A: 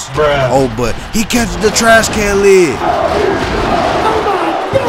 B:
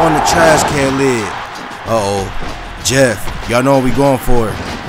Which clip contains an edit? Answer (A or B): B